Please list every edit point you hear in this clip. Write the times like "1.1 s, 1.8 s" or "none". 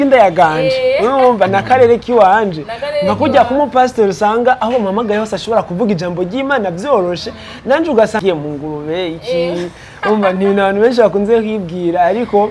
8.2 s